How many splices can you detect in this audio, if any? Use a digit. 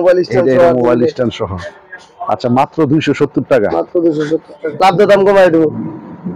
1